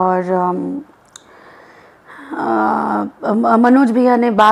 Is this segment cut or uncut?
uncut